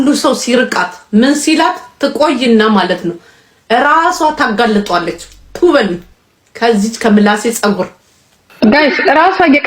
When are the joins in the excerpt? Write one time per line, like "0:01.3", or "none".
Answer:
0:08.5